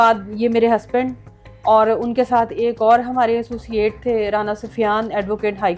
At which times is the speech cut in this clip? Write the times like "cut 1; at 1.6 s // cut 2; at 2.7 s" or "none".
none